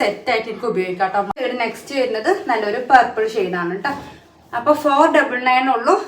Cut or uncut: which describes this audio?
cut